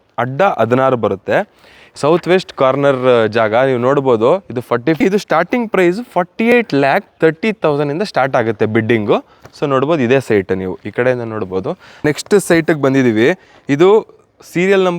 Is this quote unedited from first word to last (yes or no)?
no